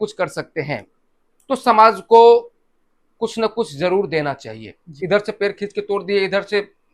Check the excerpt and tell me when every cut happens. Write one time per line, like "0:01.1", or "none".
0:04.9

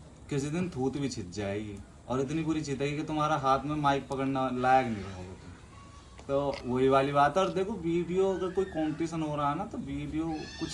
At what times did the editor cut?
none

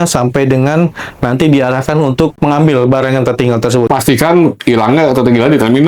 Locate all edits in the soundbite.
0:02.4
0:03.9

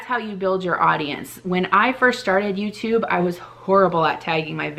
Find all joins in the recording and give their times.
none

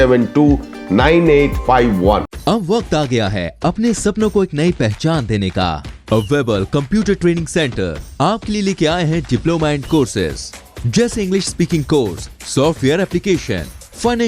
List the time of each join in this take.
none

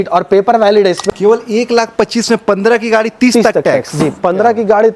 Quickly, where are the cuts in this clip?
0:01.0

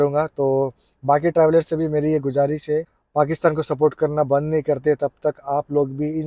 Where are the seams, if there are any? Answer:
0:03.0

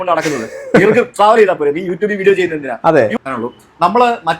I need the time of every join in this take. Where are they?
0:03.1

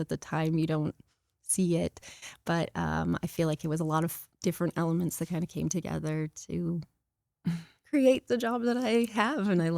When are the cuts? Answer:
none

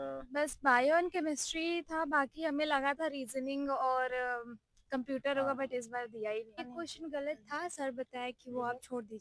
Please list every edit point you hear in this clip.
none

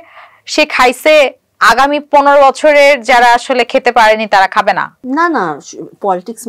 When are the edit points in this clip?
0:05.0

